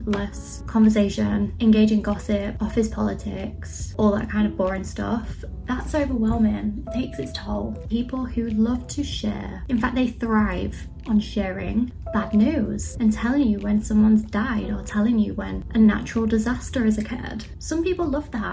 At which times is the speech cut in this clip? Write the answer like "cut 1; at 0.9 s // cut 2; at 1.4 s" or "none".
cut 1; at 7.8 s // cut 2; at 9.5 s // cut 3; at 12.0 s // cut 4; at 12.8 s